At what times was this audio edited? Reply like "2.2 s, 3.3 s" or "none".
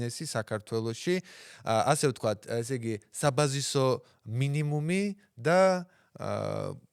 none